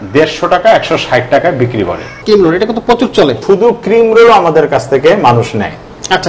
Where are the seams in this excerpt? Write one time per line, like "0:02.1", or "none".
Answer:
0:02.2
0:03.4